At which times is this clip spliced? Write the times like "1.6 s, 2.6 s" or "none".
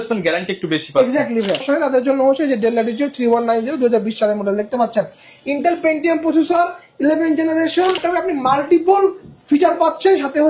1.6 s, 8.0 s